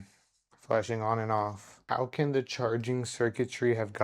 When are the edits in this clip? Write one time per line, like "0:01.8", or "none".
0:01.8